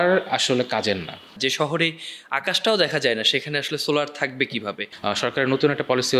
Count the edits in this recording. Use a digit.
2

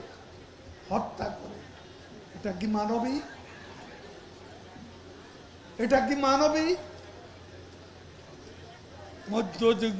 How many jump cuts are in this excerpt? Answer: 0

